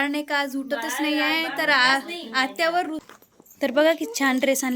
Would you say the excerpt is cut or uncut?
cut